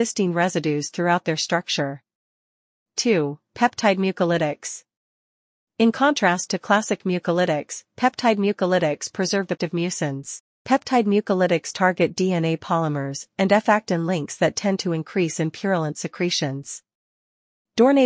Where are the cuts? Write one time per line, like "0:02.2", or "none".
none